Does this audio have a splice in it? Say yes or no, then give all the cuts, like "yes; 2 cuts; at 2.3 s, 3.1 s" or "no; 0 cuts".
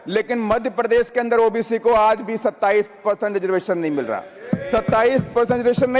no; 0 cuts